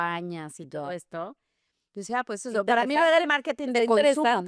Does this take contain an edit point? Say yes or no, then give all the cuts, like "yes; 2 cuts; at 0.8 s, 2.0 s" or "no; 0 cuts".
no; 0 cuts